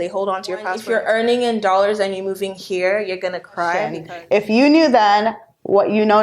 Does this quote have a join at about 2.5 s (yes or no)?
no